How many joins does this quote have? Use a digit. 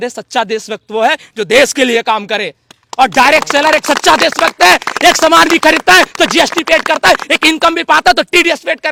0